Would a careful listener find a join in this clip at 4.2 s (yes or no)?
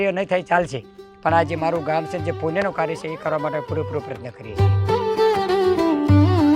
yes